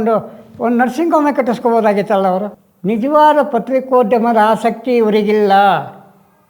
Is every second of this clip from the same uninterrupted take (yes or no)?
no